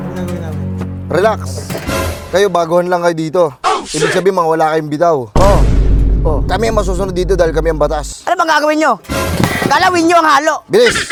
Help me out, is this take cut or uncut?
uncut